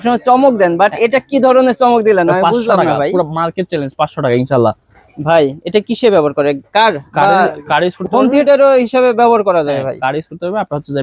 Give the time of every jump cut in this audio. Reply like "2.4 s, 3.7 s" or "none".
none